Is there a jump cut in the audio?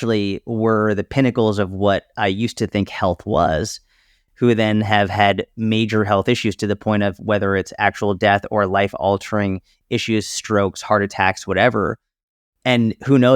no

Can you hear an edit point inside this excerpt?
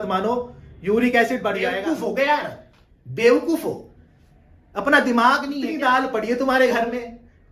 yes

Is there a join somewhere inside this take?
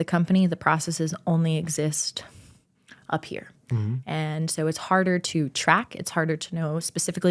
no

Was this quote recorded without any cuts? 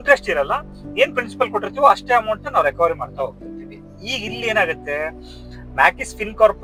yes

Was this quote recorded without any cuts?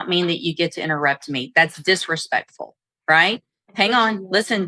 yes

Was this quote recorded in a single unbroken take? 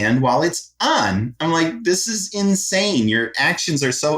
yes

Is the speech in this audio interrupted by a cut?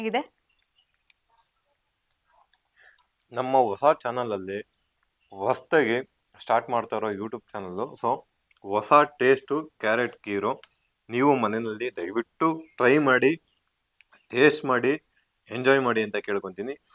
no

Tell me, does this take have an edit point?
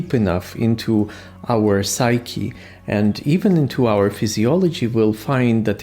no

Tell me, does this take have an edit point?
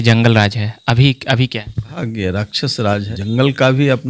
yes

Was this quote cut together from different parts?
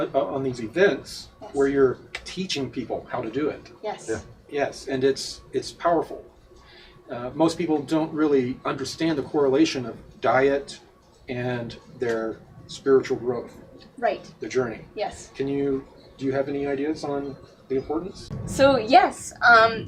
no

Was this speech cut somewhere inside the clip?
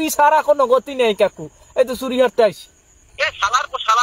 yes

